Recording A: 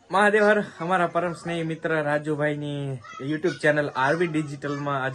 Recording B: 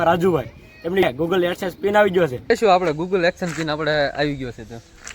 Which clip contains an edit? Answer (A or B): B